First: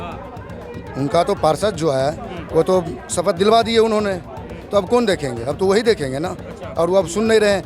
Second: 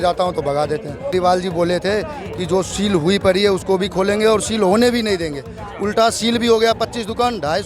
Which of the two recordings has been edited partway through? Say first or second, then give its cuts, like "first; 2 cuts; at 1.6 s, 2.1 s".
second; 1 cut; at 1.1 s